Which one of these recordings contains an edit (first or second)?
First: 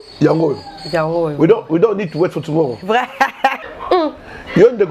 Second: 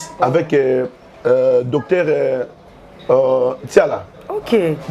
first